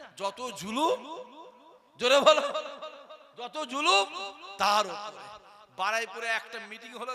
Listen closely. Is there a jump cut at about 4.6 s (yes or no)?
no